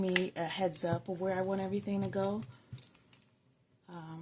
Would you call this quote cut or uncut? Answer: uncut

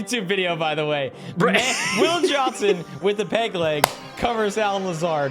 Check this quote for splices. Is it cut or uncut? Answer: uncut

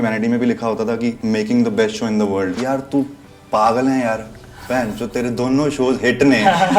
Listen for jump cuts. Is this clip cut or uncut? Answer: cut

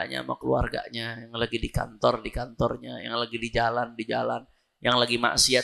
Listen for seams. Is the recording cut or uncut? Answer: uncut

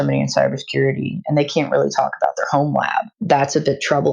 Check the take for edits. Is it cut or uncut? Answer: cut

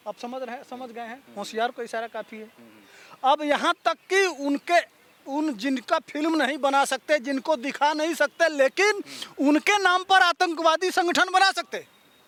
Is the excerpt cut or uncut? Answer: uncut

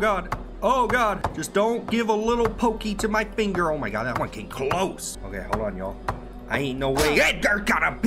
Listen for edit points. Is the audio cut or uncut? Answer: cut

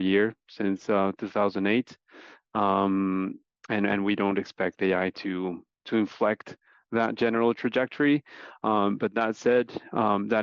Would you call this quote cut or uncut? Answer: uncut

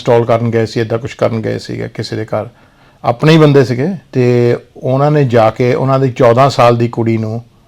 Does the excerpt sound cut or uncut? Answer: cut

